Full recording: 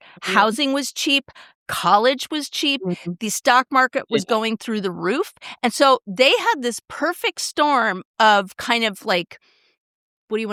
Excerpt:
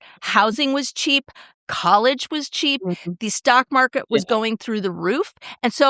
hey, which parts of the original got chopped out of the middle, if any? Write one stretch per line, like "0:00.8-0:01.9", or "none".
none